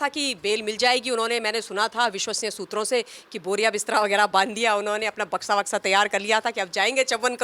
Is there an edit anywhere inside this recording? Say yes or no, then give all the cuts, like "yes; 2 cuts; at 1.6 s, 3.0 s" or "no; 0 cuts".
no; 0 cuts